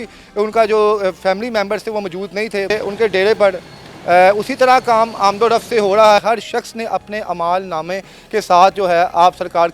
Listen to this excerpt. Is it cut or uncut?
cut